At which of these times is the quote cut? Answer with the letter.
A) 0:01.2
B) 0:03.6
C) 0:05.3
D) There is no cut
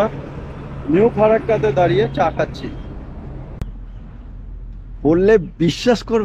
B